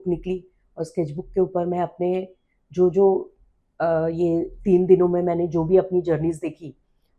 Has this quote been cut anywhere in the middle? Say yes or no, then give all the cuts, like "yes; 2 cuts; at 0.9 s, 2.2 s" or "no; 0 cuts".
no; 0 cuts